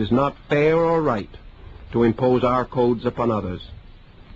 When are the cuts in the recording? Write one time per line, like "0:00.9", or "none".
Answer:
none